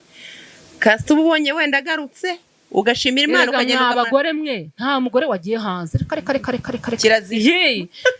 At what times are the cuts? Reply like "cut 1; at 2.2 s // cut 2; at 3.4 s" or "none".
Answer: cut 1; at 7.3 s